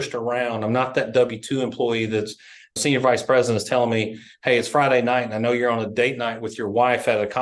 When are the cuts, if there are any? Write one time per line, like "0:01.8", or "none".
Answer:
0:02.8